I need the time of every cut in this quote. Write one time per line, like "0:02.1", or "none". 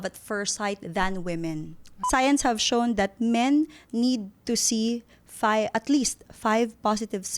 0:01.9